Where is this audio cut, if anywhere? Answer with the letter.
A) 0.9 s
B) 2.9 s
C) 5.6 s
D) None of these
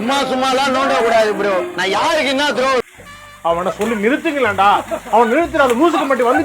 B